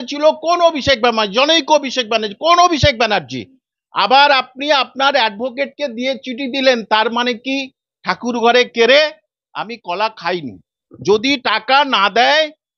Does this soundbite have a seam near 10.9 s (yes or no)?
yes